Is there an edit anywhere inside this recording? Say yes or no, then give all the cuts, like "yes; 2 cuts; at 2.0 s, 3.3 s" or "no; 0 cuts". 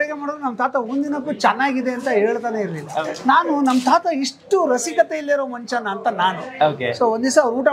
yes; 1 cut; at 3.0 s